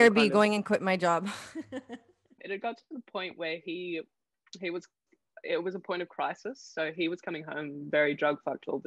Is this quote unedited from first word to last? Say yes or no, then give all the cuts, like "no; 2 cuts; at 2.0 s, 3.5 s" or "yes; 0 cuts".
no; 1 cut; at 2.3 s